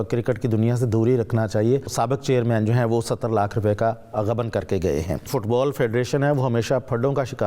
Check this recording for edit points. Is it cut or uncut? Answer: cut